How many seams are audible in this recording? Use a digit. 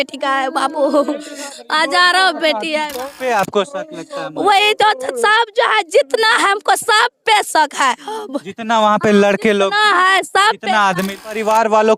2